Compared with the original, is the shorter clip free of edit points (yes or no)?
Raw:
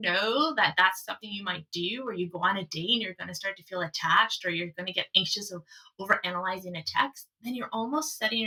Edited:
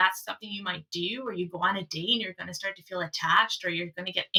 yes